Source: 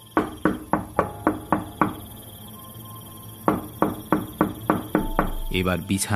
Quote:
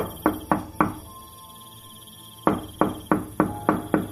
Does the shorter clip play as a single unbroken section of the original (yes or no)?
yes